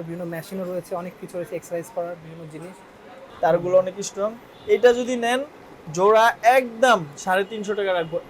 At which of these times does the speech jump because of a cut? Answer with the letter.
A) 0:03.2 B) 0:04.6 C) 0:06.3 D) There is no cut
A